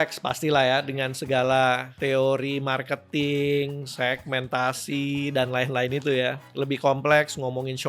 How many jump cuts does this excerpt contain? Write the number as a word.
two